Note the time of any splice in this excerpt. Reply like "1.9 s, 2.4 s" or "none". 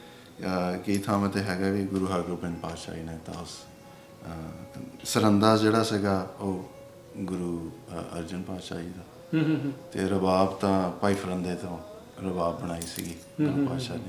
4.9 s